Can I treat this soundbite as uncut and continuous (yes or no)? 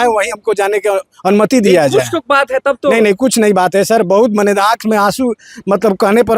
yes